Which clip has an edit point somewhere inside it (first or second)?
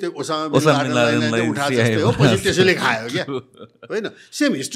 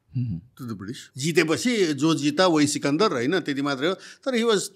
second